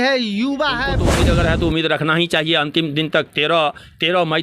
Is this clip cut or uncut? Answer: cut